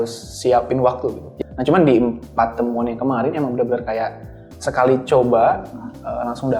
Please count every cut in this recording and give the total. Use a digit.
1